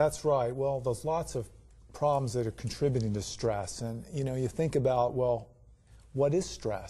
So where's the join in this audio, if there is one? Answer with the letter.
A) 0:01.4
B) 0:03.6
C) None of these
B